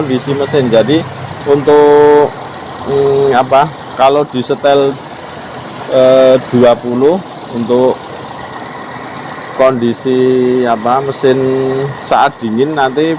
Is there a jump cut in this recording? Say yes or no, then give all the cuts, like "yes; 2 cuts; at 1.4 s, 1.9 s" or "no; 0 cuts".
no; 0 cuts